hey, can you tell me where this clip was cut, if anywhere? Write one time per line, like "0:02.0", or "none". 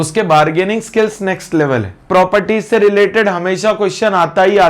0:02.1